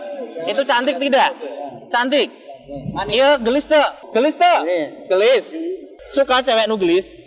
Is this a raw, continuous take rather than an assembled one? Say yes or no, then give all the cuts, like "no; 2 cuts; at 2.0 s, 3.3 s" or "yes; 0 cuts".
yes; 0 cuts